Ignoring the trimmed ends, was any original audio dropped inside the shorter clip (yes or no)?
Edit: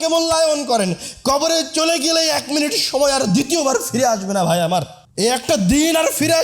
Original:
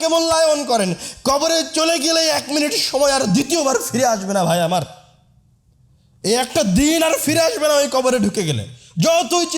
yes